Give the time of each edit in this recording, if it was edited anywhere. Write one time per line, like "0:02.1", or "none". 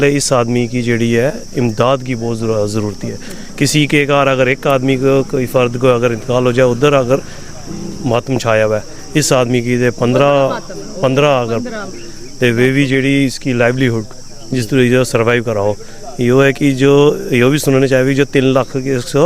none